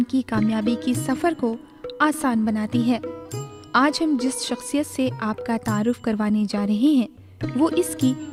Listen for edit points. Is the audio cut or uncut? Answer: uncut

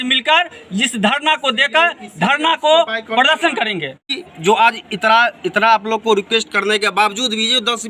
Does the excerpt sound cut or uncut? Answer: cut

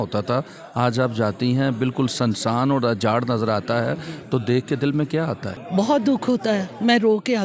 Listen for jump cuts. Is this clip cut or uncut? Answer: uncut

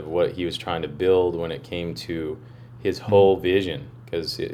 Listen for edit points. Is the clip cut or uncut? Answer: uncut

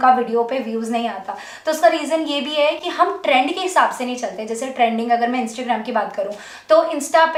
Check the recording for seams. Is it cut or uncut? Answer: uncut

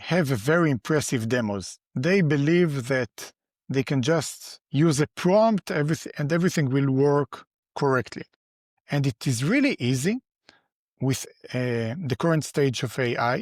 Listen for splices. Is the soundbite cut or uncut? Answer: uncut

